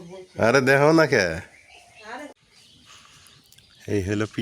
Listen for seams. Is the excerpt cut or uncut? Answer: cut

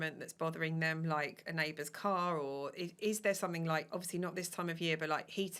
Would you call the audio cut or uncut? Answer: uncut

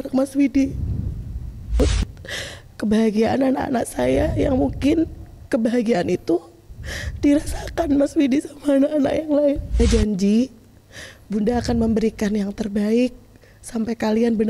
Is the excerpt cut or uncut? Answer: cut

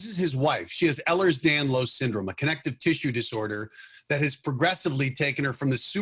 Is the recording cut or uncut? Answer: uncut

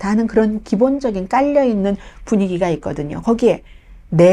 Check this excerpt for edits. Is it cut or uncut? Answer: uncut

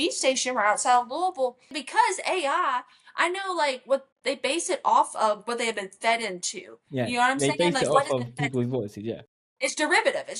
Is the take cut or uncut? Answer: cut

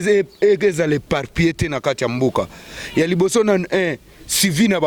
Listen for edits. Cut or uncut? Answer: cut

